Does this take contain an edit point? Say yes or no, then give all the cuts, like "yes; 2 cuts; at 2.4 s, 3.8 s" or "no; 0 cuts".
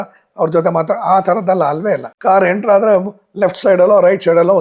yes; 1 cut; at 2.1 s